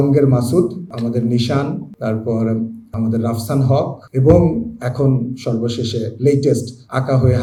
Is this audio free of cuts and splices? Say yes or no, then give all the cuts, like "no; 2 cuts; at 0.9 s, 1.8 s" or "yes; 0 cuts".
yes; 0 cuts